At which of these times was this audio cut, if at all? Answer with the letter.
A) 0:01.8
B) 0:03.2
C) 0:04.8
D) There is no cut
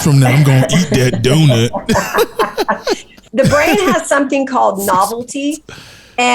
B